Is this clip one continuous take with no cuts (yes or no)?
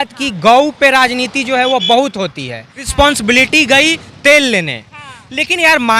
no